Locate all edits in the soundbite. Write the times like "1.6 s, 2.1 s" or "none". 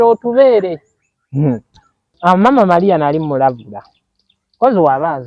2.1 s

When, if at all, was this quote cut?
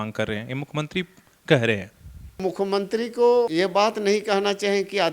2.4 s, 3.5 s

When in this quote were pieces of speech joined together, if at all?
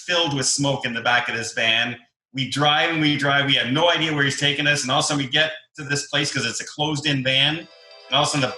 none

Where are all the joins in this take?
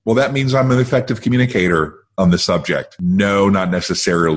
2.9 s

